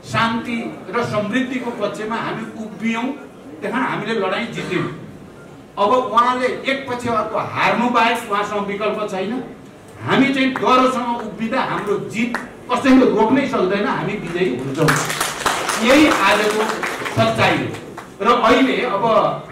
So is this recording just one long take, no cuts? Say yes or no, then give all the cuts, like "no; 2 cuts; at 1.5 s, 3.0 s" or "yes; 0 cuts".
yes; 0 cuts